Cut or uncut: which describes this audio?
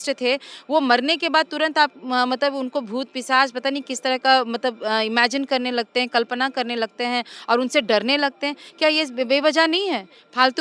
uncut